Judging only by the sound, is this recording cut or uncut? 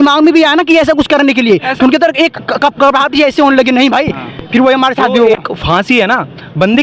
uncut